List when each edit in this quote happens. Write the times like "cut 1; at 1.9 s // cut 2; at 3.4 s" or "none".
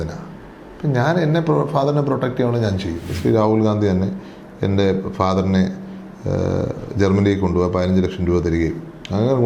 cut 1; at 3.1 s